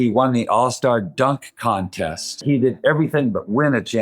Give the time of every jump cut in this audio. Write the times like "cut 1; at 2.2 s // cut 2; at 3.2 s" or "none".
cut 1; at 2.4 s